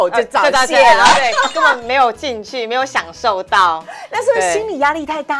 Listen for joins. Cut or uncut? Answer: uncut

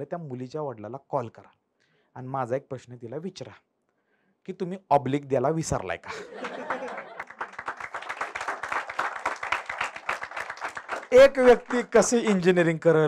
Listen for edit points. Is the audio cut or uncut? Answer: cut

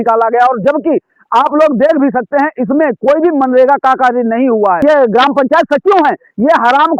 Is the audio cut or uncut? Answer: cut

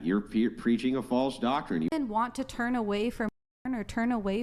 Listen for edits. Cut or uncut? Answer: cut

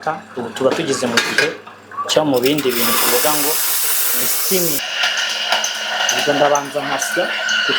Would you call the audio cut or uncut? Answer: cut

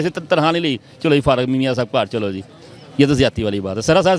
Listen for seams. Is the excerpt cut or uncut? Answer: uncut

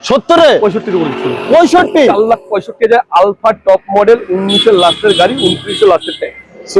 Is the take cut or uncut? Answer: uncut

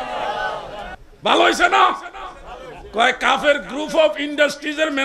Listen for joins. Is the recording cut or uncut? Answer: cut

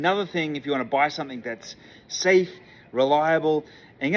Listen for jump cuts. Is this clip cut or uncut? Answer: uncut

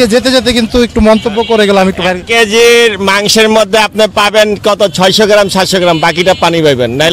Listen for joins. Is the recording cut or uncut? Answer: uncut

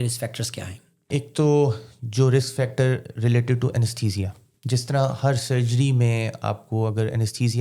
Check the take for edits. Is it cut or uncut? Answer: cut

